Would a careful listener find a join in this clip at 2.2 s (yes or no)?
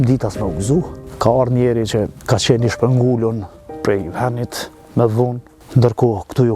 yes